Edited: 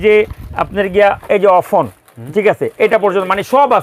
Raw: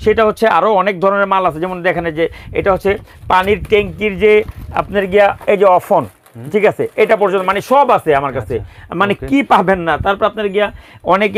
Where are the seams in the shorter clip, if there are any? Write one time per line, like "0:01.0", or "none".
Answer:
none